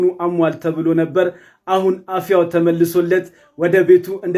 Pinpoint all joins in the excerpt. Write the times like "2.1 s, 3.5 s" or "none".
none